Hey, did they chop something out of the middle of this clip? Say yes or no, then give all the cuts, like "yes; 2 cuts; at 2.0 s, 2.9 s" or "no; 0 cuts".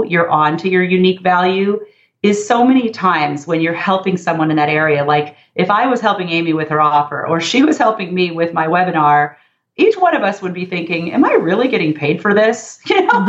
no; 0 cuts